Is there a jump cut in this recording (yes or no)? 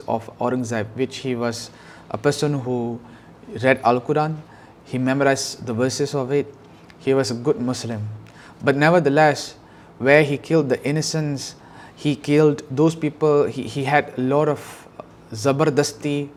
no